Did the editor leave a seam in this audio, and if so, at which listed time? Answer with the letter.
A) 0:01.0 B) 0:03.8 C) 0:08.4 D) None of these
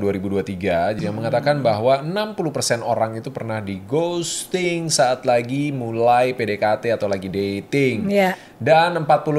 A